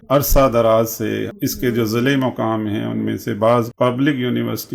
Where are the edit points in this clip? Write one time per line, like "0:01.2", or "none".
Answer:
0:01.3
0:03.7